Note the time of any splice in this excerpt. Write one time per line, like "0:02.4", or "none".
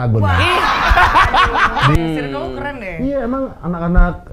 0:02.0